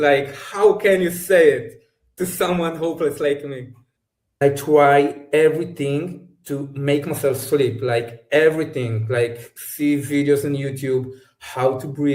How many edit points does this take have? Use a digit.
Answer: 1